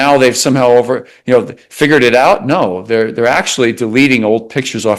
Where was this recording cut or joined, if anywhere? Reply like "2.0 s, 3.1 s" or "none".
none